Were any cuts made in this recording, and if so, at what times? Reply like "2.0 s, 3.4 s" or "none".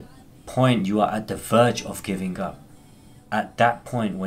3.2 s